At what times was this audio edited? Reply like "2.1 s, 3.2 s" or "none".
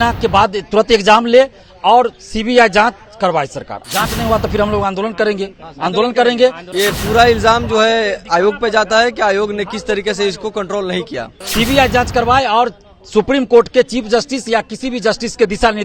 3.8 s, 6.6 s, 11.4 s